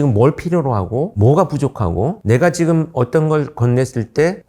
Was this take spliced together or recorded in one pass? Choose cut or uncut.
uncut